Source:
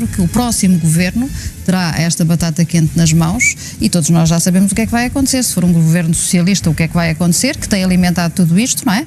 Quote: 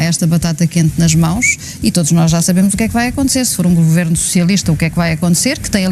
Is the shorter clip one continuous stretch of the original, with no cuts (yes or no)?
yes